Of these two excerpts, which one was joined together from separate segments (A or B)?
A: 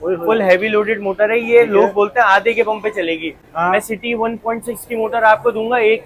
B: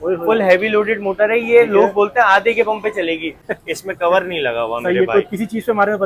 B